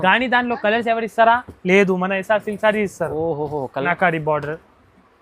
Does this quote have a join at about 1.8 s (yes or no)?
no